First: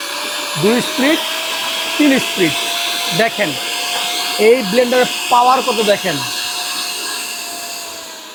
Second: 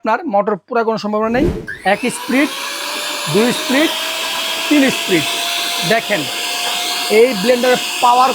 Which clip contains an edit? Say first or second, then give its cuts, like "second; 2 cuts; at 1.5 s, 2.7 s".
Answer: second; 1 cut; at 1.7 s